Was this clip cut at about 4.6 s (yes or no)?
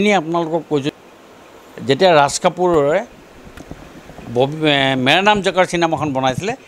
no